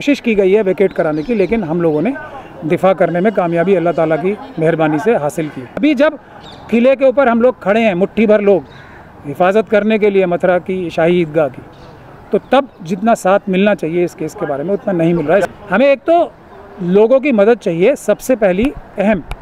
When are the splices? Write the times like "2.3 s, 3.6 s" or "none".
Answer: 5.8 s, 15.4 s